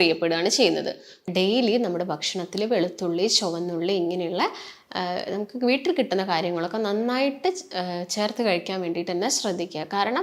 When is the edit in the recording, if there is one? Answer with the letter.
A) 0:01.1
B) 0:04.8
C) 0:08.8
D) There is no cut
A